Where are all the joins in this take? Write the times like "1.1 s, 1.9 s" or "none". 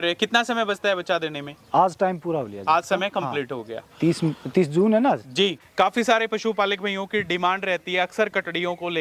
5.6 s